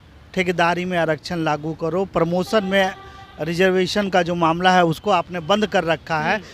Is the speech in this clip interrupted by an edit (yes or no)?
no